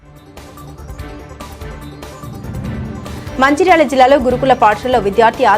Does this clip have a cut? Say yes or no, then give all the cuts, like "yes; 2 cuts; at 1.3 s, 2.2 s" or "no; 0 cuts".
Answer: yes; 3 cuts; at 1.3 s, 2.0 s, 3.1 s